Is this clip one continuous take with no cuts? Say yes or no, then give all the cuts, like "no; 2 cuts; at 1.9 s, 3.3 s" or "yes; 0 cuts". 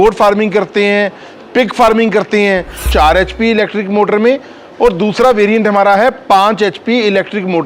no; 1 cut; at 2.8 s